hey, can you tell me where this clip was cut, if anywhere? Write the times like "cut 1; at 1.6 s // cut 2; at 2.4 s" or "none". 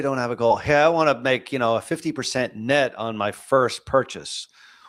none